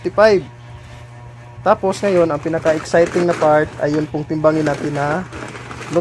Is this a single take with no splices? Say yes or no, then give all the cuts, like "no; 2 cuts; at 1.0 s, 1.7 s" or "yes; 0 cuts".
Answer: yes; 0 cuts